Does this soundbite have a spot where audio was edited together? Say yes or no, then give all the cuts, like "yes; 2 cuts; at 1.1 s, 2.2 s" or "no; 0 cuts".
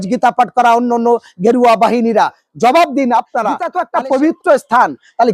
yes; 1 cut; at 3.7 s